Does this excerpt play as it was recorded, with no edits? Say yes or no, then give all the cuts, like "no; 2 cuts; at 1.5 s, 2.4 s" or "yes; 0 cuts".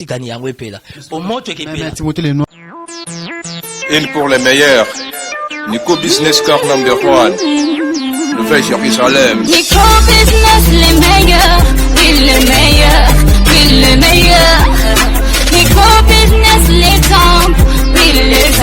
no; 1 cut; at 2.5 s